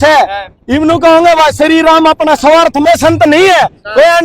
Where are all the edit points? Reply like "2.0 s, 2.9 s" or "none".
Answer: 2.8 s